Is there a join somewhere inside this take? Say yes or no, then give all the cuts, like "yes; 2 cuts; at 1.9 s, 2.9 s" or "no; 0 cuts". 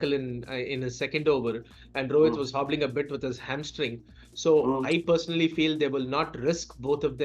no; 0 cuts